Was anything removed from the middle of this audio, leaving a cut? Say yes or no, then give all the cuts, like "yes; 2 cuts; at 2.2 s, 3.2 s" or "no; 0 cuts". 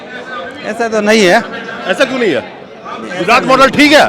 no; 0 cuts